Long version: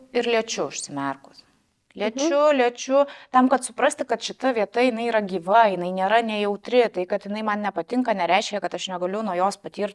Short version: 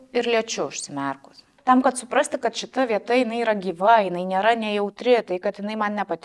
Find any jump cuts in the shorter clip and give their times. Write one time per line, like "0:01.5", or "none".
0:01.5

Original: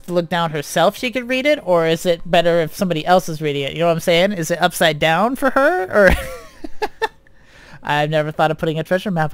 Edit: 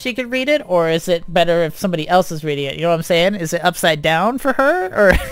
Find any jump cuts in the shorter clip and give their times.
none

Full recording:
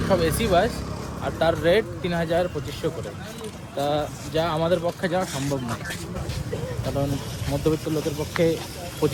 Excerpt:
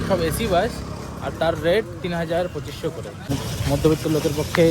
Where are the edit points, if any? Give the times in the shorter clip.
0:03.3

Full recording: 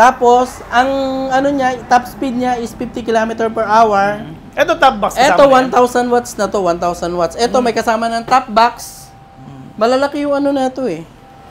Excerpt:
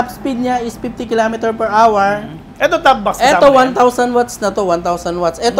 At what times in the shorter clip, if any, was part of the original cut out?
none

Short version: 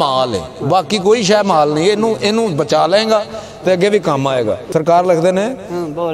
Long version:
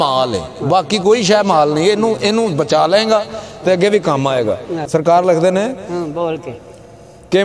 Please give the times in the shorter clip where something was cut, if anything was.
0:04.6

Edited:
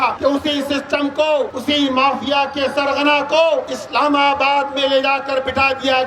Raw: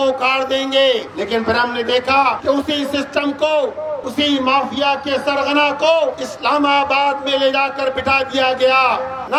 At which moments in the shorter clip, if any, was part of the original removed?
0:01.5

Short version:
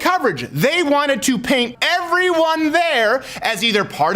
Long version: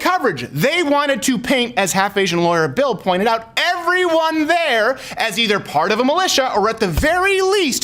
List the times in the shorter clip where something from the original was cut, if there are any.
0:01.7

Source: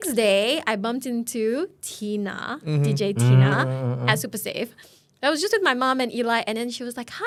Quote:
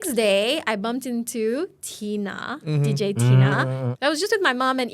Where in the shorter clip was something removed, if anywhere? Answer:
0:03.9

